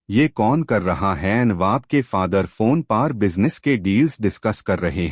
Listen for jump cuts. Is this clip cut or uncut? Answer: uncut